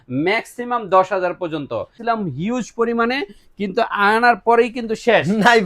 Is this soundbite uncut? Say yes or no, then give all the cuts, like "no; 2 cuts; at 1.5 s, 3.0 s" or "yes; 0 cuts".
no; 1 cut; at 1.9 s